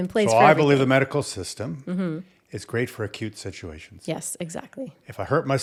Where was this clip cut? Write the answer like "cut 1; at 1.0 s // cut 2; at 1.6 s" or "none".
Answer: none